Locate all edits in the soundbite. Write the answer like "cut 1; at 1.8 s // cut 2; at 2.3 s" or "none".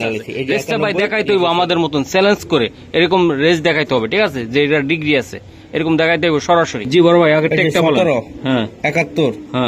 cut 1; at 1.2 s